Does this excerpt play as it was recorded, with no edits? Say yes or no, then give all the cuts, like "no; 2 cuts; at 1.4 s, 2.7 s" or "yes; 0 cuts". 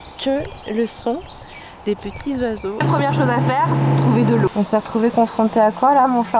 no; 2 cuts; at 2.8 s, 4.5 s